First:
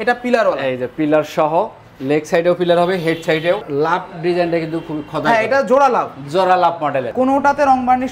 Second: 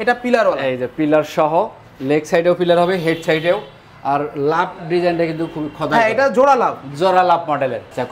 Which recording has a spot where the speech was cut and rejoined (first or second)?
first